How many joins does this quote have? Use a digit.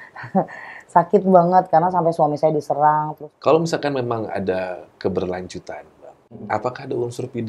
1